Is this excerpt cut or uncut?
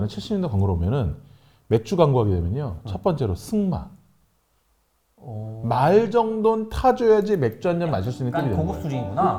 uncut